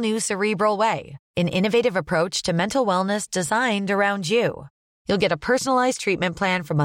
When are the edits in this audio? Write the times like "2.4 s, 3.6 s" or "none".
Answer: none